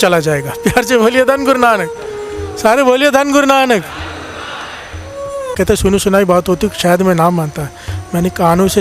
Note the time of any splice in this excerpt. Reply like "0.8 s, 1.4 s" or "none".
5.6 s